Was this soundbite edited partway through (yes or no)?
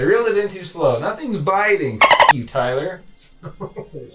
no